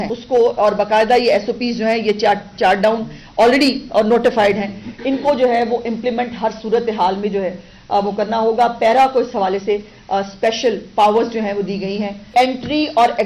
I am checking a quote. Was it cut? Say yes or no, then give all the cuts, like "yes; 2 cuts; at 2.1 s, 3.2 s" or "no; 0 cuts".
yes; 1 cut; at 12.3 s